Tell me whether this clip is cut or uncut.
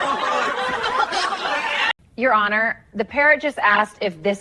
uncut